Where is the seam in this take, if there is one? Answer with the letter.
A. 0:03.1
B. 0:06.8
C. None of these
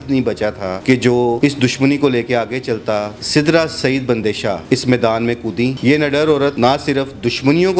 A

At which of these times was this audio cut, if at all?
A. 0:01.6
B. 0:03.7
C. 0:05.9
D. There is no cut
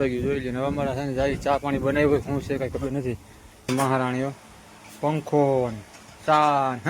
B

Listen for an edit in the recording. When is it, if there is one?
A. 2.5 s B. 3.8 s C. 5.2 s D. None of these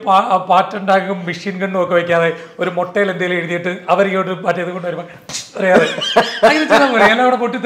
D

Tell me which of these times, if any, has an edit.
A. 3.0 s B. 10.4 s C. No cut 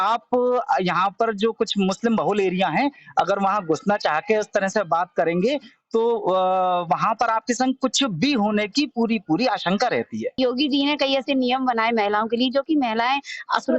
B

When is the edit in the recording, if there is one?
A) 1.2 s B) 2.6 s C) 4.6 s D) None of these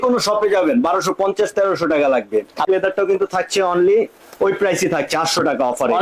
B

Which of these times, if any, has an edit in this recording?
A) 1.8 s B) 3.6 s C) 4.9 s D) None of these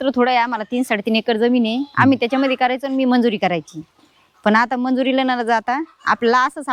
D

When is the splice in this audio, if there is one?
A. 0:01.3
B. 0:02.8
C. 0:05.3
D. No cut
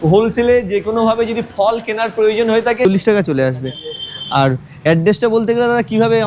B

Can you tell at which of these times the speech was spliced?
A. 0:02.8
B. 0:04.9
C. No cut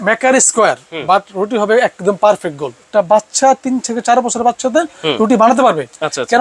A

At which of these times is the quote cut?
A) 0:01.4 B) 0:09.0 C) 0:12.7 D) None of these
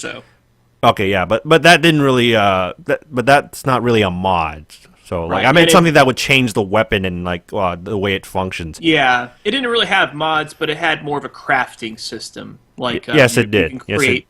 B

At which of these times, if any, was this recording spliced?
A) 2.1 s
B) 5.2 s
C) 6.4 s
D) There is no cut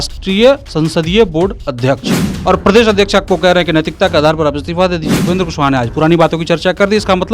B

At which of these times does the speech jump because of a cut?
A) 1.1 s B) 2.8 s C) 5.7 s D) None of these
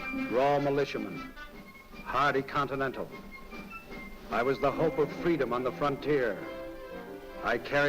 C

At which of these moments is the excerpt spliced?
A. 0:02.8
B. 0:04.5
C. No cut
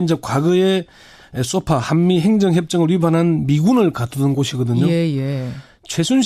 B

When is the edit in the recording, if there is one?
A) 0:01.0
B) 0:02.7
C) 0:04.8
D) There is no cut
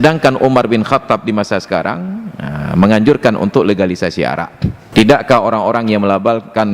C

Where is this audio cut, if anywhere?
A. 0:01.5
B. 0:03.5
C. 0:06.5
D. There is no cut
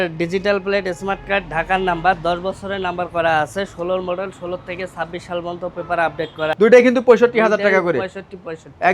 C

